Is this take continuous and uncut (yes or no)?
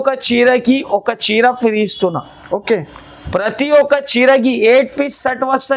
yes